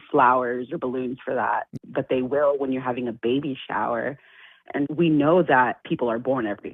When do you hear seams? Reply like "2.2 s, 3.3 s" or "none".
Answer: 4.9 s, 5.8 s

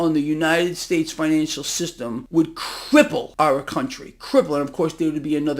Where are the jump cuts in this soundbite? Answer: 2.2 s, 3.3 s

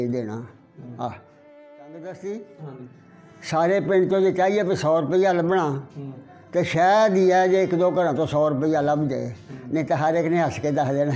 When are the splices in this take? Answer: 1.9 s

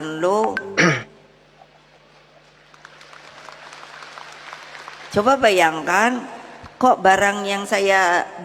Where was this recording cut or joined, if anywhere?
none

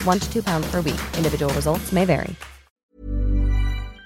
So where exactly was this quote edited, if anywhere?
2.9 s

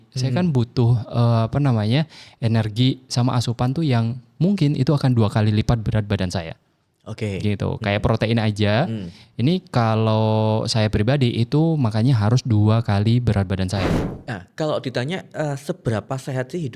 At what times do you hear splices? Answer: 14.1 s

